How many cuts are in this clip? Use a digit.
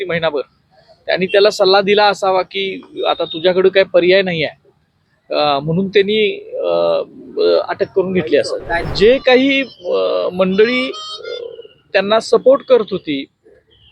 1